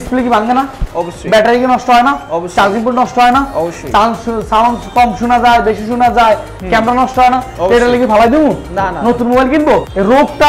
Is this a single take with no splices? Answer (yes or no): yes